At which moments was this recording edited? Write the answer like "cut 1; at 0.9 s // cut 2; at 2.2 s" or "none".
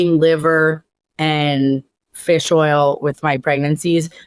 none